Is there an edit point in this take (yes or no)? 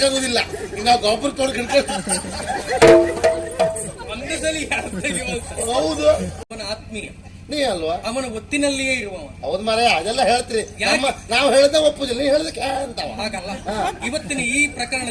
yes